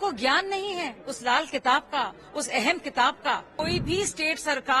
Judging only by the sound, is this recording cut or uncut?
cut